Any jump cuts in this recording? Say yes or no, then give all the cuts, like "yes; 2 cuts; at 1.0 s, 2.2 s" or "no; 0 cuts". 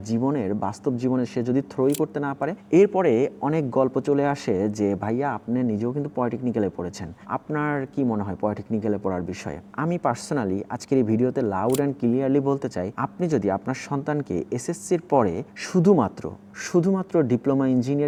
no; 0 cuts